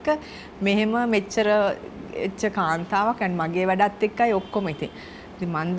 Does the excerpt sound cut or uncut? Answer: uncut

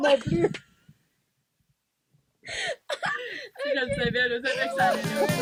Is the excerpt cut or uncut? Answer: uncut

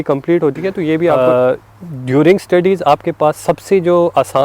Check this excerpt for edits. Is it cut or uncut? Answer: cut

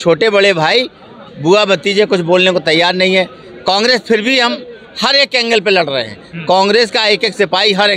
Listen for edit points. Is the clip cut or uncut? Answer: uncut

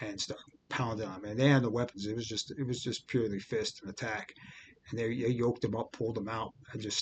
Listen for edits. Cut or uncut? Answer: uncut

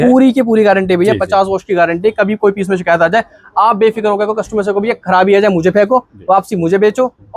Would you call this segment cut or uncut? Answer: uncut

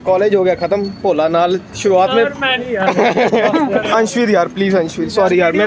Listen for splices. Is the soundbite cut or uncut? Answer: cut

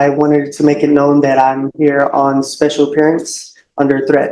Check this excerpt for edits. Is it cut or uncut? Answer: uncut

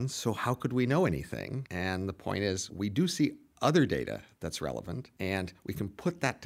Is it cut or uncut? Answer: cut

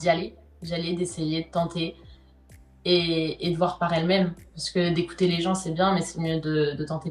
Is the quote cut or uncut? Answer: uncut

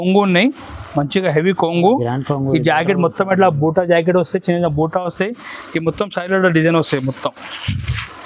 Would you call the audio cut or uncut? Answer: uncut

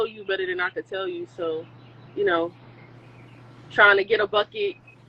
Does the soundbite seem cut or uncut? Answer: uncut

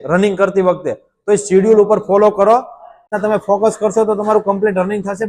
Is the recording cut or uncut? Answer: cut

